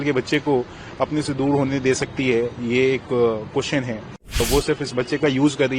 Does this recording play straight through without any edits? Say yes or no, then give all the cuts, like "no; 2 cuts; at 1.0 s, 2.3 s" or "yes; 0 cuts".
no; 1 cut; at 4.4 s